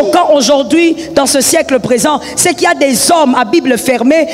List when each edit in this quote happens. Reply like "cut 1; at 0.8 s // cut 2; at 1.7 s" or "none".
none